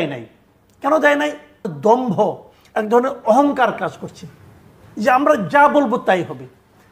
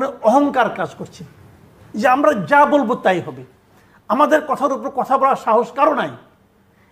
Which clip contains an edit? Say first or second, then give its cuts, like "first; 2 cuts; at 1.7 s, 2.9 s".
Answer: first; 1 cut; at 1.5 s